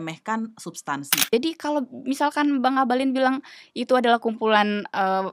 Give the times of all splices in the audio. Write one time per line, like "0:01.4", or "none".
0:01.3